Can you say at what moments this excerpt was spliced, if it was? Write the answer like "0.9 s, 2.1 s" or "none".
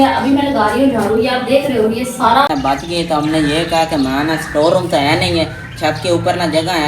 2.5 s